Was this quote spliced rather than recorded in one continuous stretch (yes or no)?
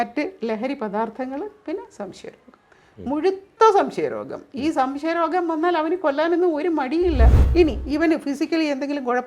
yes